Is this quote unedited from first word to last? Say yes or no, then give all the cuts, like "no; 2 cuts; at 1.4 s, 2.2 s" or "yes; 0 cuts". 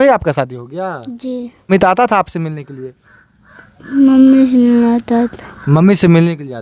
no; 1 cut; at 1.7 s